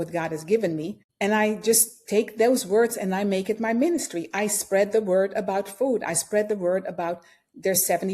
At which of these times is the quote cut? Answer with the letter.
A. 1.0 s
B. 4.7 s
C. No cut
A